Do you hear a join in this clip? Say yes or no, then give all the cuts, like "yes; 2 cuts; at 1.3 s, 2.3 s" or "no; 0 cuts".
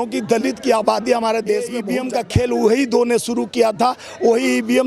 yes; 1 cut; at 1.9 s